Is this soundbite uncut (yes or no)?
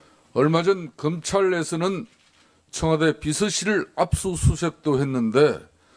no